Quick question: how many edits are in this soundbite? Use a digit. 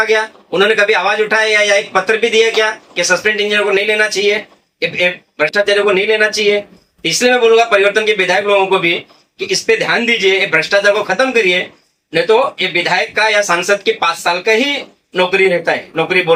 0